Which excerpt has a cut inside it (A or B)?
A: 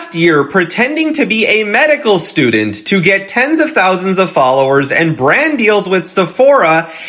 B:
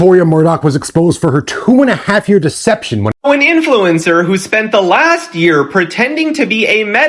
B